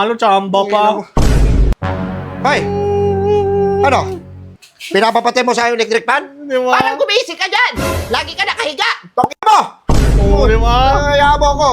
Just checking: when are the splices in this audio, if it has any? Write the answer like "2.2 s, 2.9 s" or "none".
1.7 s